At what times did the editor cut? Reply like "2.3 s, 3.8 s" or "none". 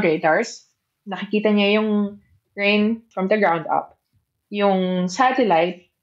3.1 s